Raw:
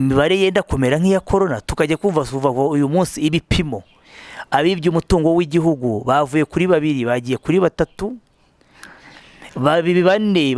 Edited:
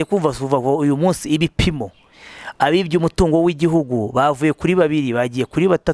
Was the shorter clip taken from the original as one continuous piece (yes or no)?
yes